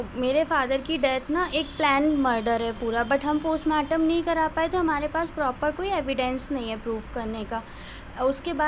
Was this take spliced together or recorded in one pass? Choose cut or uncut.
uncut